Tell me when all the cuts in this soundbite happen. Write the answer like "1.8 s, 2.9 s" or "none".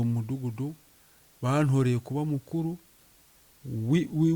none